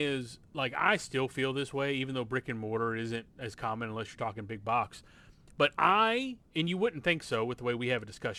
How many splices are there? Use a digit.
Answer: 0